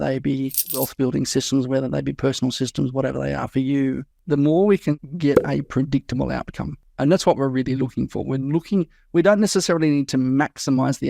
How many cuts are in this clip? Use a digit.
1